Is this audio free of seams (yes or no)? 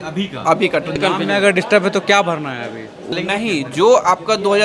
no